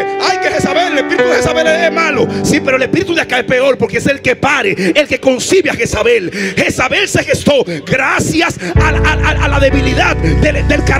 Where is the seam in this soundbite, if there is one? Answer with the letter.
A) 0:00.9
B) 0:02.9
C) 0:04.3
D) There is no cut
D